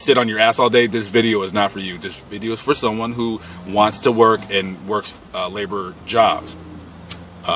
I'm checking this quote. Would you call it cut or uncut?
cut